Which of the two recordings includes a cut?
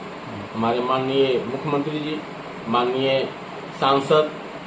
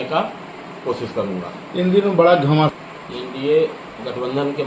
second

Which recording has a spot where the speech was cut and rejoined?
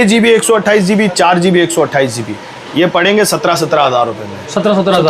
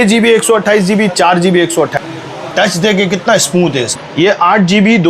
second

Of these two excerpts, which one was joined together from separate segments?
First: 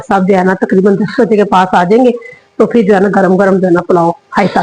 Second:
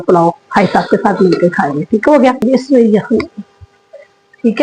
second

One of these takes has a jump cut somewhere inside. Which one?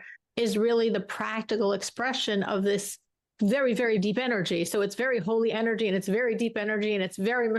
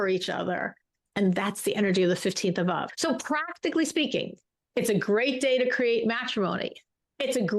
second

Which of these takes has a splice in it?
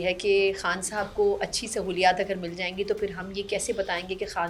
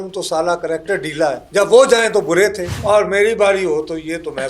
second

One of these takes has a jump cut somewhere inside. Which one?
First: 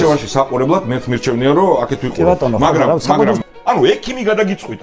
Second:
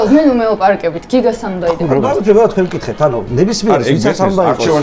first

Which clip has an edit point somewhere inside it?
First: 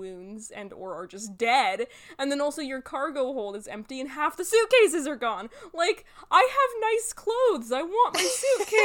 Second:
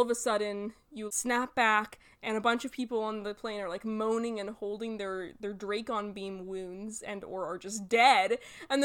second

